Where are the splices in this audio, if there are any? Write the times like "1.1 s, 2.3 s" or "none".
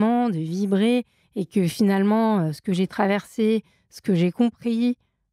none